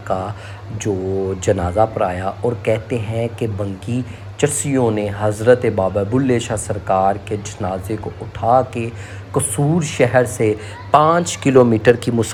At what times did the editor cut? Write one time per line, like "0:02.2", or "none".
none